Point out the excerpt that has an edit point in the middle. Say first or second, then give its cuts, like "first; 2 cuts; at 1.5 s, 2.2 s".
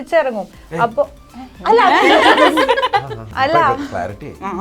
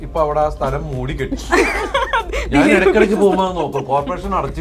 first; 1 cut; at 3.2 s